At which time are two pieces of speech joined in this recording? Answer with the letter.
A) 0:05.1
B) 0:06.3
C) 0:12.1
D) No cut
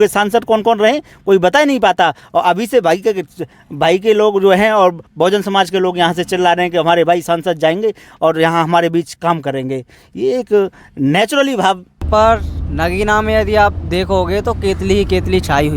C